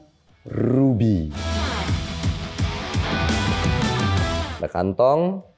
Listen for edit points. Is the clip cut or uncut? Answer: cut